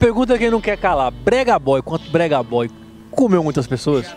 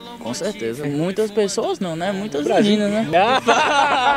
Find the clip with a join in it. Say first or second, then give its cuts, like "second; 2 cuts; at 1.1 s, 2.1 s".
second; 2 cuts; at 0.9 s, 3.1 s